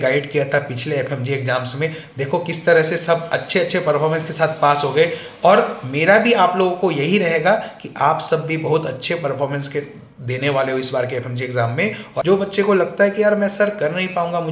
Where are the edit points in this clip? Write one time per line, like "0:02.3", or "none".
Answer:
0:12.2